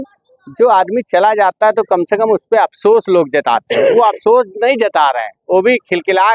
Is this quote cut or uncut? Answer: uncut